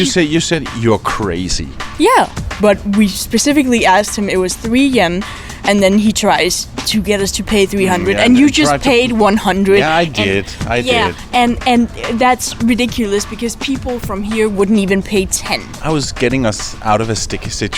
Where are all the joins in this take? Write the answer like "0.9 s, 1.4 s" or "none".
2.5 s, 15.7 s